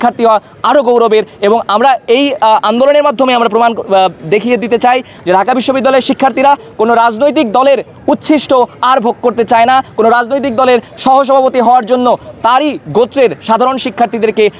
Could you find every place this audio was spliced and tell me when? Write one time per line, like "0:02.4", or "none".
none

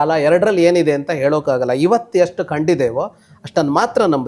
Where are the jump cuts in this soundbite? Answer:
none

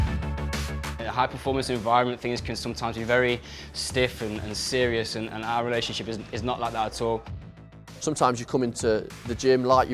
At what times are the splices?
0:07.2

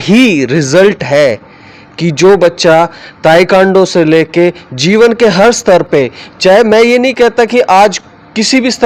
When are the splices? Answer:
none

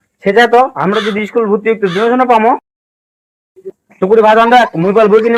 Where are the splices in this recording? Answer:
none

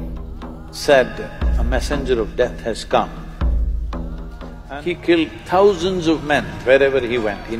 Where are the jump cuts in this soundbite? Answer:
0:04.5

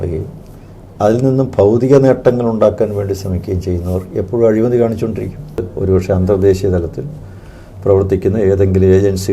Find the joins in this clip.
0:05.7

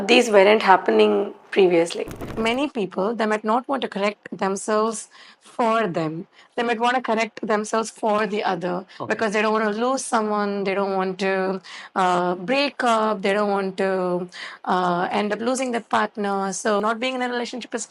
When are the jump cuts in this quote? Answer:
0:02.2
0:16.8

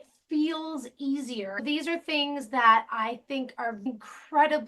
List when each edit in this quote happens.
0:01.5

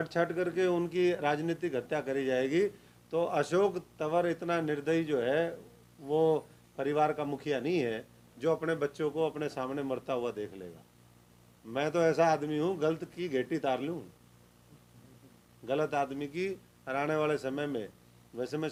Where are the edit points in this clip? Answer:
none

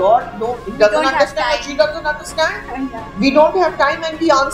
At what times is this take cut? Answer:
none

